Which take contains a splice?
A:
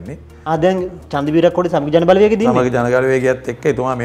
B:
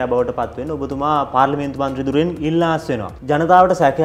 B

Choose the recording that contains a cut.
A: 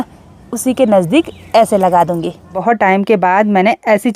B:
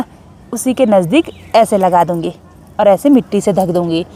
A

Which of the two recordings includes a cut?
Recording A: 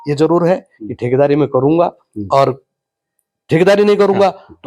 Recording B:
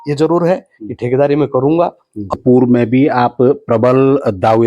B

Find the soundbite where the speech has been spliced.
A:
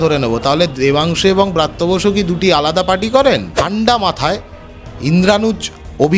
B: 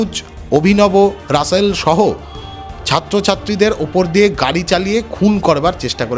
A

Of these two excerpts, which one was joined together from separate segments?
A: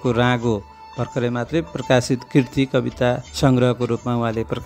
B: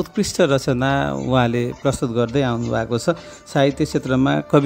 A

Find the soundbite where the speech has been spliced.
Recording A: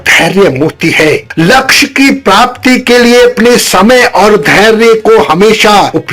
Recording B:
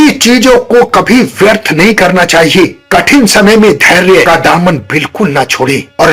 A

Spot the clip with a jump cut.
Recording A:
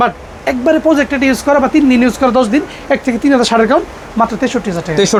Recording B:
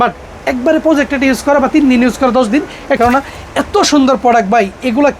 B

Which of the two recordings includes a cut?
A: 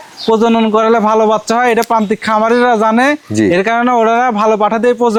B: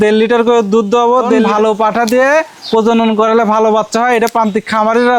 B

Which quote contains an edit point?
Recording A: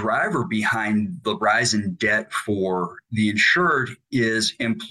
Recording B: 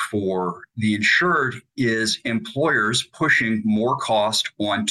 A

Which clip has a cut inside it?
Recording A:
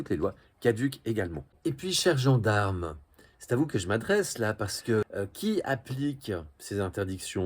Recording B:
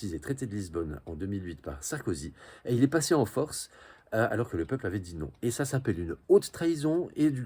A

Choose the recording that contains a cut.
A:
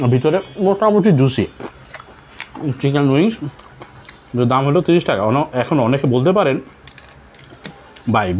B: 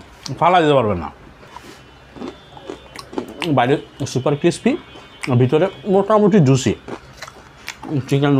B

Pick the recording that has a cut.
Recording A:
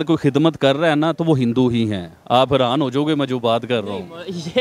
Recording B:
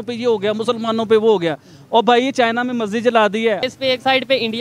B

